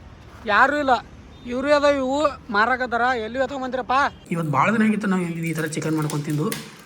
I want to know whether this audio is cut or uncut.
cut